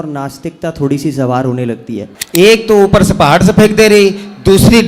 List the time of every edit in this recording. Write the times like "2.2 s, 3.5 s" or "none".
2.1 s